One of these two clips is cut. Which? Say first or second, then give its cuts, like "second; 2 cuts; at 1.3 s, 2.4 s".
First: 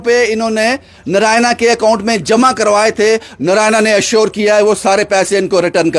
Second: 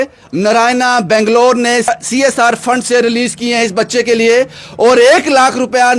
second; 1 cut; at 1.9 s